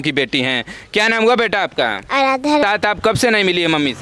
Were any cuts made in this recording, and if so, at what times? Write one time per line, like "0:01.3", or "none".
0:02.6